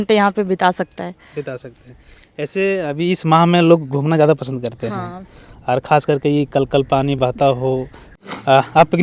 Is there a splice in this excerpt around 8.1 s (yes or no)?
yes